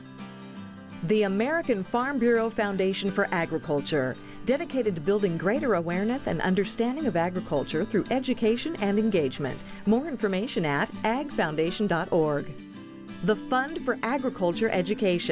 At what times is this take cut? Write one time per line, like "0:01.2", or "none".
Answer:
0:01.0